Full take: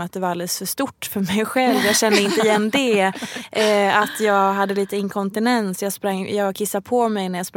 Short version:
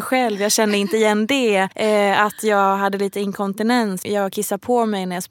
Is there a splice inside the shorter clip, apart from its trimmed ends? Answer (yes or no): yes